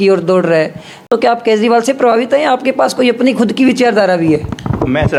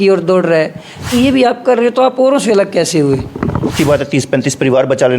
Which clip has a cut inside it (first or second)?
second